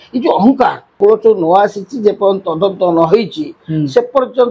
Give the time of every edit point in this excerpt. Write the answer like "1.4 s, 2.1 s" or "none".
1.0 s